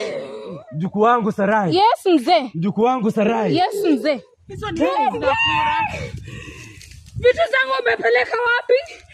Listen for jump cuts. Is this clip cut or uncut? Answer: uncut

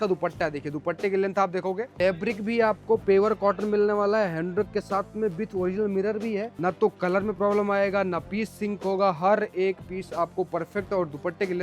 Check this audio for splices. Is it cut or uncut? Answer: cut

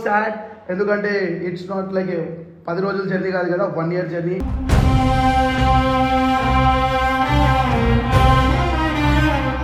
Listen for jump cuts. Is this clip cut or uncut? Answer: uncut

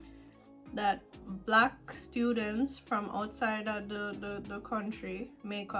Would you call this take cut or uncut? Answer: uncut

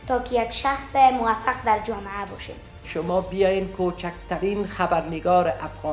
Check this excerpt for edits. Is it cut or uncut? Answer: cut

